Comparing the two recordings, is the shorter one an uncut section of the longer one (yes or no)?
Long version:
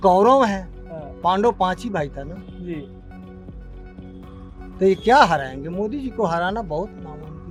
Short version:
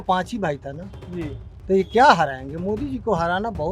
no